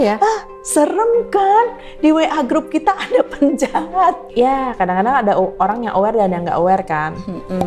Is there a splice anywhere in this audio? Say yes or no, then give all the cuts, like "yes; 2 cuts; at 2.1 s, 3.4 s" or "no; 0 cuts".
yes; 1 cut; at 4.3 s